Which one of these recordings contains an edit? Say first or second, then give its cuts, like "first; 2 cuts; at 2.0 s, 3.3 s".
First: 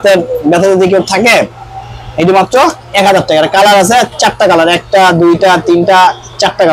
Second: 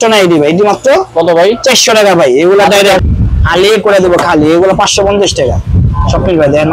second; 1 cut; at 3.0 s